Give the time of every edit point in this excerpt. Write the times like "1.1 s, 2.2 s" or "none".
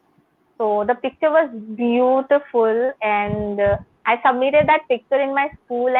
none